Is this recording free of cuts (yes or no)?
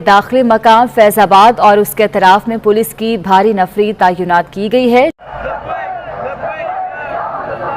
no